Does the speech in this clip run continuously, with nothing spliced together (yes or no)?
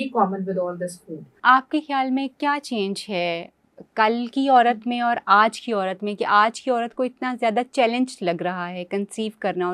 no